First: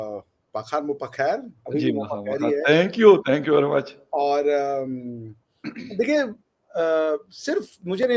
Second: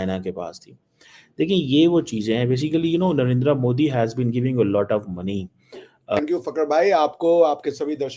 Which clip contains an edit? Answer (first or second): second